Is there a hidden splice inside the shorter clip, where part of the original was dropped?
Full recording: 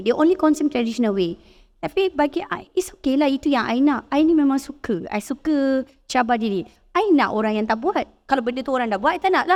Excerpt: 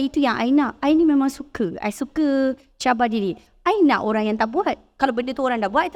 no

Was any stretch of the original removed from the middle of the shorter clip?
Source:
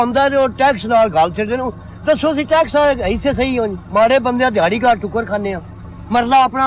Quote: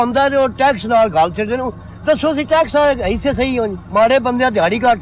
no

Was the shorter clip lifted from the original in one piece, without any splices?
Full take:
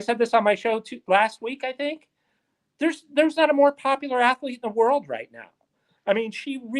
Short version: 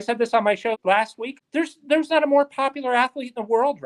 no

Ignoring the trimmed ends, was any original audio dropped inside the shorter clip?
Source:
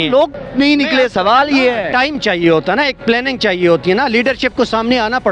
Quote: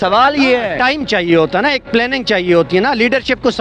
no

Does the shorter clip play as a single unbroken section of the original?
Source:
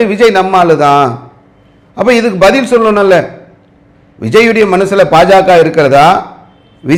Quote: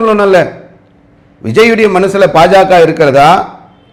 yes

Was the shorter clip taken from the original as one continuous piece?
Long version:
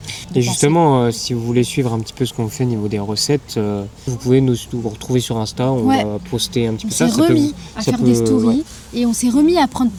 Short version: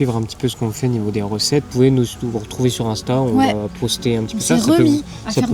no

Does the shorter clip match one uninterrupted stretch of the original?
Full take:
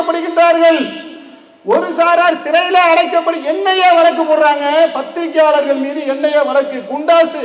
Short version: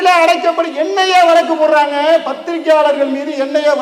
yes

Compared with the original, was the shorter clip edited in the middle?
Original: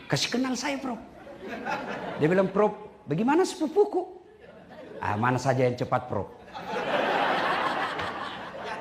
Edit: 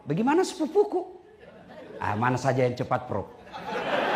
no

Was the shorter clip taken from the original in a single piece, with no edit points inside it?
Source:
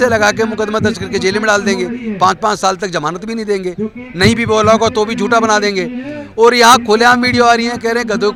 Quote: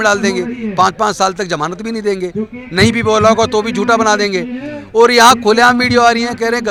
yes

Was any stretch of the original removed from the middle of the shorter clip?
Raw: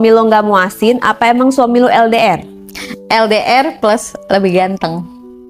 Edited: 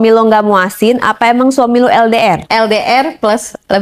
yes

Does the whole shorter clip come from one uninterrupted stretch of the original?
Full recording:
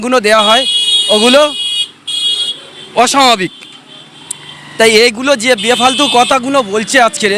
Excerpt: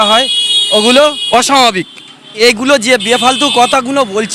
no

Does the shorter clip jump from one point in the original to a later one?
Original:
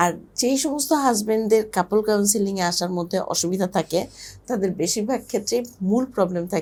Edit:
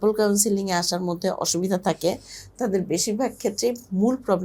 no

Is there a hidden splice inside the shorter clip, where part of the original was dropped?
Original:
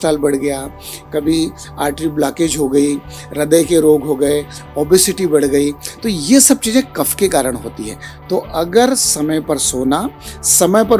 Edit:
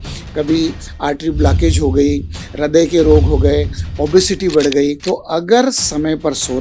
yes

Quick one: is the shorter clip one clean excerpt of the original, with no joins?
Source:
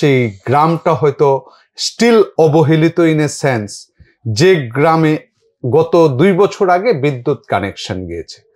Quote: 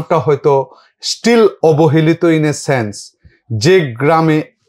yes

